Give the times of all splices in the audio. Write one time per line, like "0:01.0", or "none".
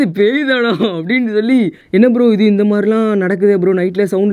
0:01.8